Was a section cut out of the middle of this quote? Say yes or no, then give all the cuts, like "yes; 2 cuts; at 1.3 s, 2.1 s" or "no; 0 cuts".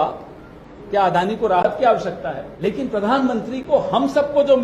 yes; 1 cut; at 2.5 s